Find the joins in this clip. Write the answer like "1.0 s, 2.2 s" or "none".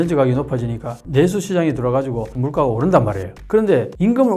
1.0 s, 2.3 s